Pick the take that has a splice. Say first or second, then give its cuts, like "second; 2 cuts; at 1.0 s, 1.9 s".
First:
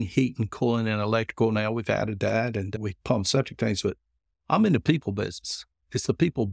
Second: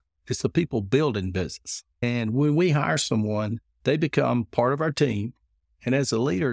second; 2 cuts; at 2.0 s, 3.6 s